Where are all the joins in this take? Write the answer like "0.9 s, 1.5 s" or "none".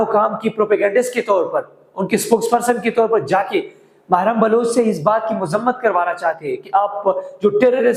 none